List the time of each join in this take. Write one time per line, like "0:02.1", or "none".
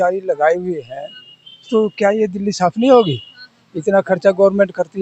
none